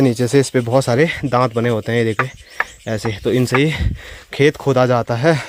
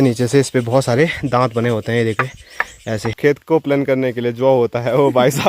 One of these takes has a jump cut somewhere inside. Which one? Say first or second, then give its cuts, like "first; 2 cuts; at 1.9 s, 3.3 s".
second; 1 cut; at 3.1 s